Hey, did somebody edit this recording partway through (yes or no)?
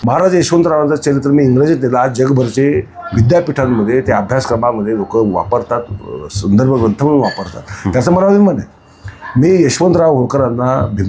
no